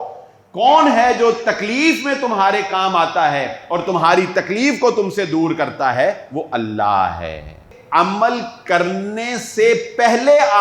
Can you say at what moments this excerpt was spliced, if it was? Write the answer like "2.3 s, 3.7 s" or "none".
7.7 s